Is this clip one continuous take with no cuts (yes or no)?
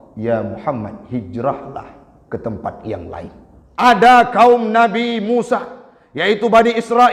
no